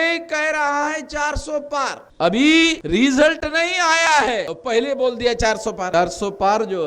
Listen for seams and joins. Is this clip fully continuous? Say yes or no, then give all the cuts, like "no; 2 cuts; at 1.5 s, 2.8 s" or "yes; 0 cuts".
no; 4 cuts; at 2.0 s, 2.8 s, 4.5 s, 5.9 s